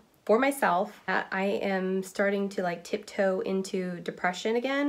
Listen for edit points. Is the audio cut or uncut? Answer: cut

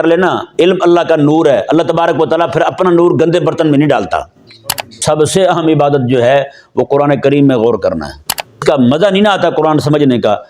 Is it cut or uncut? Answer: cut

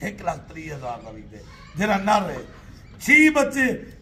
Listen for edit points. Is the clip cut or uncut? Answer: uncut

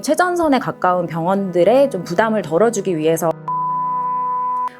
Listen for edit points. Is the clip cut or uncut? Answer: uncut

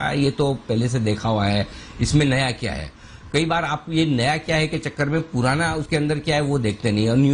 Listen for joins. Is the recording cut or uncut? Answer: uncut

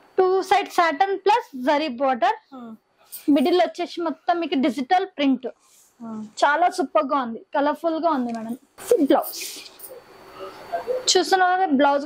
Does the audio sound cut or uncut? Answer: uncut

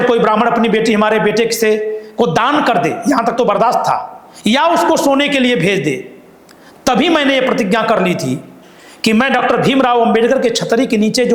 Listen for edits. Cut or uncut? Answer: uncut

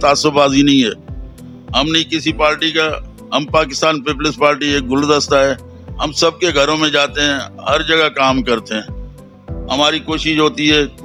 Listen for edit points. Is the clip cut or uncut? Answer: uncut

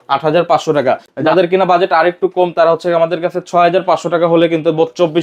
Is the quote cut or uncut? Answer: uncut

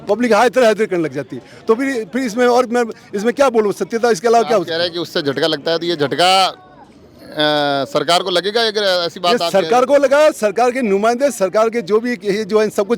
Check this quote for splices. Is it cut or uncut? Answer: uncut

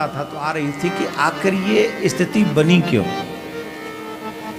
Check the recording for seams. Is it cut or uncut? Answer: uncut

